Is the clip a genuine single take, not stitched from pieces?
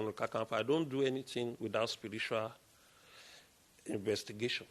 yes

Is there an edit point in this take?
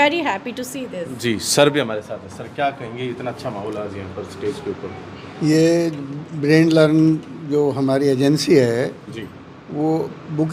no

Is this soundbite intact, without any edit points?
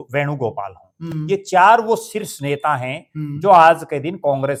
yes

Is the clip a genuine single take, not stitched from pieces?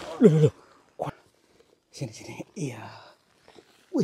no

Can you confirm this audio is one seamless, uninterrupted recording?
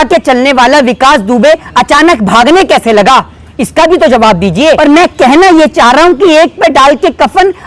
yes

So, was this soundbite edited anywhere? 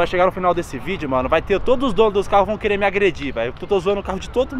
no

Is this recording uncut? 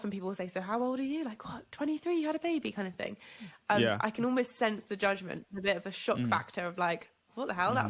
yes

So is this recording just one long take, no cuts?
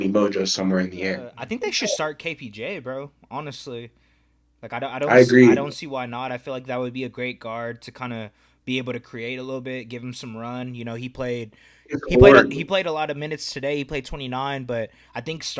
no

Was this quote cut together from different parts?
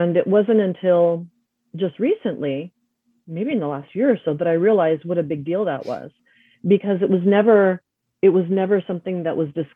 no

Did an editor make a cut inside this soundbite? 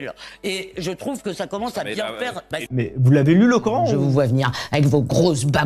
yes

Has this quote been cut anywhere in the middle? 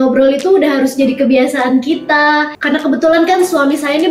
yes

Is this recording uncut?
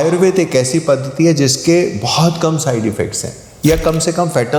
yes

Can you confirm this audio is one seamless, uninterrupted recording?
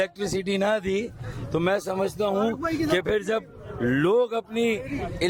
yes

